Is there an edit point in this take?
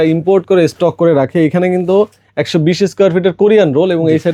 no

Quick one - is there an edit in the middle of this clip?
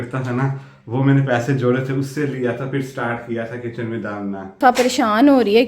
yes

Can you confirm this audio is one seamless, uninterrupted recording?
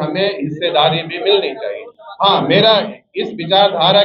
yes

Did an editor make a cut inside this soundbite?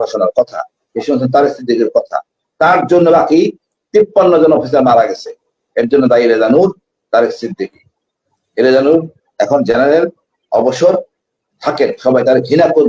no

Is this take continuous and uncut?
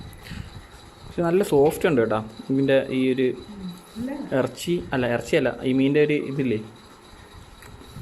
yes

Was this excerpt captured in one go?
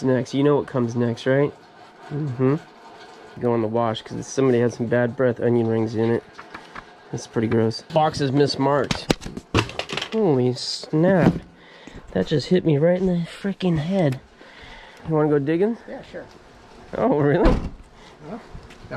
no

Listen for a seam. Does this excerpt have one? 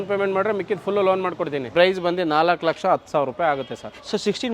yes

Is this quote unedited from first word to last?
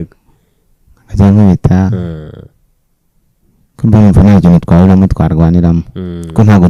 yes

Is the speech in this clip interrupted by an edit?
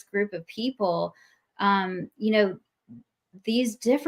no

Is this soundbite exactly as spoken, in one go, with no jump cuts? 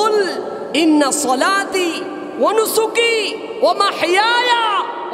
yes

